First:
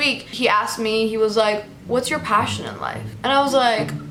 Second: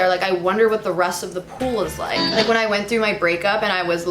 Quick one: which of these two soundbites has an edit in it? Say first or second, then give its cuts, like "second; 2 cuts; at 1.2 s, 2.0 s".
second; 1 cut; at 2.2 s